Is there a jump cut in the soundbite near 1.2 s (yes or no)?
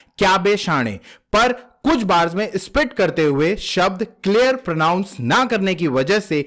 no